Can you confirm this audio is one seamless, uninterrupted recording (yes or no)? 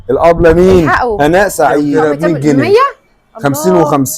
no